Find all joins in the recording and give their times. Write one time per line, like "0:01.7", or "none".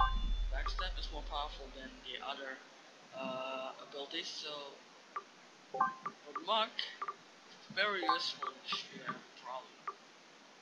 0:06.2